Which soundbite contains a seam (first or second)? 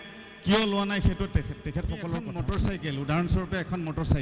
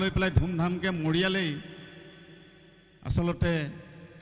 first